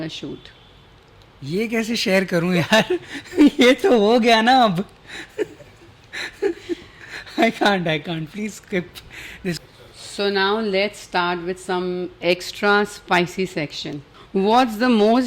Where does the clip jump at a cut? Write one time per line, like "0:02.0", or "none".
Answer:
0:09.6
0:14.1